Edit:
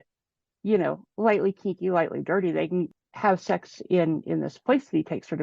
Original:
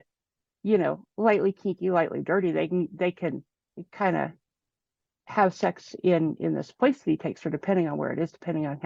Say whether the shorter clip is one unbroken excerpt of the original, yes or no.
no